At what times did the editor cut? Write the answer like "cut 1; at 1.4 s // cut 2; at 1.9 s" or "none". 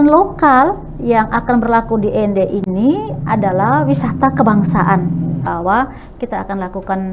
cut 1; at 5.5 s